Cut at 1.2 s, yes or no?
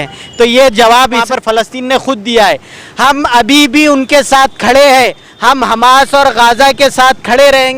yes